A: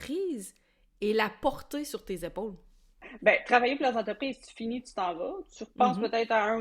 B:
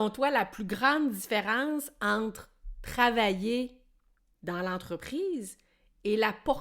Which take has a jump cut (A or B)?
A